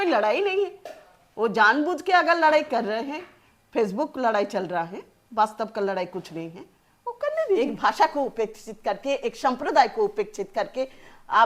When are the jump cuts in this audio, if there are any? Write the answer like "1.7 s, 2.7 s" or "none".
7.6 s